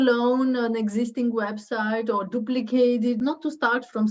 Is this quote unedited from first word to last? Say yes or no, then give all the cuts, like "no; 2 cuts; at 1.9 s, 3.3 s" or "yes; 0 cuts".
no; 1 cut; at 3.2 s